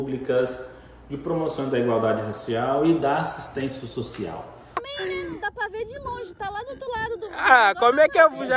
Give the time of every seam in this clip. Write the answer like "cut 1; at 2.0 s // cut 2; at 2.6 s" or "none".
cut 1; at 4.8 s